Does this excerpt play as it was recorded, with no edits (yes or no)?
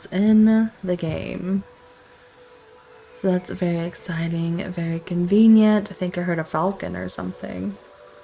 yes